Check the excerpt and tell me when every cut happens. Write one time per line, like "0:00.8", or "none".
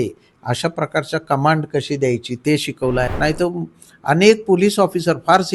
0:03.1